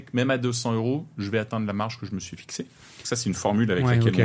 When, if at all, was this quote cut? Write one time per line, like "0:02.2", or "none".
none